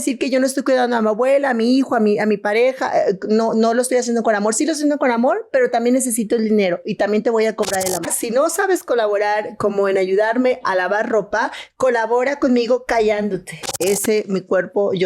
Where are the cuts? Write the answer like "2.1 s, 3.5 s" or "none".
8.0 s, 13.7 s